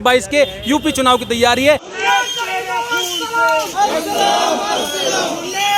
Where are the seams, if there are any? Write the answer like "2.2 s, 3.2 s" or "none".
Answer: 1.9 s